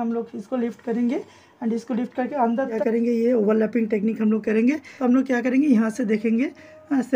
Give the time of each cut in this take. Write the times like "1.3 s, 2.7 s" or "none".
2.7 s, 4.9 s

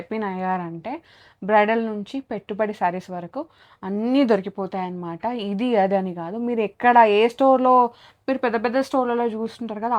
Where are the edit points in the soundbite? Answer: none

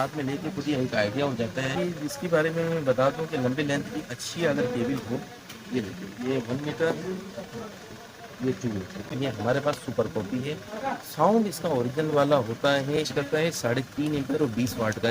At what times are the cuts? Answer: 1.6 s, 9.1 s, 13.0 s

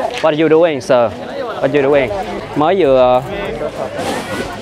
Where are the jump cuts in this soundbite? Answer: 2.4 s

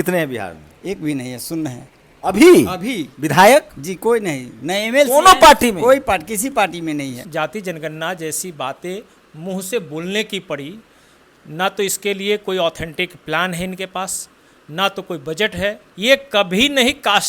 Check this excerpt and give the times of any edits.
7.2 s, 15.9 s

